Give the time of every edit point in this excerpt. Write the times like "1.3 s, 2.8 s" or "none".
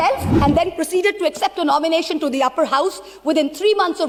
none